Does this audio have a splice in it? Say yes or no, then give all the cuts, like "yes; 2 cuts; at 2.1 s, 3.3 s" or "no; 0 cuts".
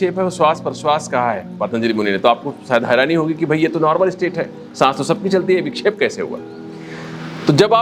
no; 0 cuts